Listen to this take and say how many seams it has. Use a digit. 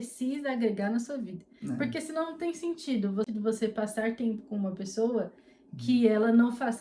1